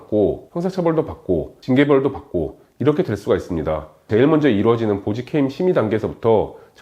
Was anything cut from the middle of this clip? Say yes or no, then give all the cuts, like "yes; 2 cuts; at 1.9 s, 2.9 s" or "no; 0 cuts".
yes; 1 cut; at 4.1 s